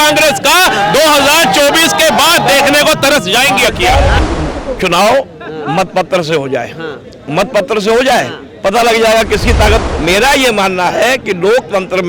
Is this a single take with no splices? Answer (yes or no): no